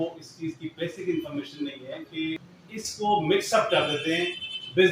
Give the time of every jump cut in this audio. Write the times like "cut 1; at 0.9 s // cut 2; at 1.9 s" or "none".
cut 1; at 2.6 s